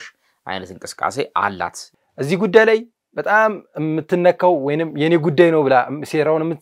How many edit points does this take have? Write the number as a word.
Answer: one